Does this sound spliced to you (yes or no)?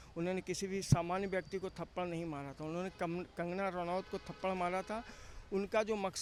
no